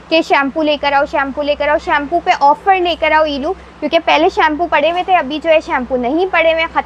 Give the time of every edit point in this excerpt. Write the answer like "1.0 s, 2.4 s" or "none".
none